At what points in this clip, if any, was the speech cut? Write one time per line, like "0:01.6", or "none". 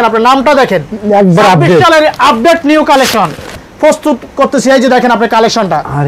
0:03.5